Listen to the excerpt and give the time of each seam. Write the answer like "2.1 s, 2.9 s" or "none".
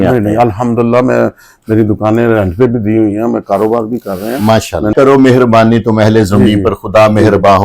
4.9 s